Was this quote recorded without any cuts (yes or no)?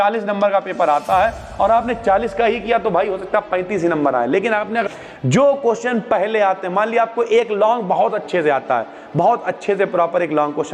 no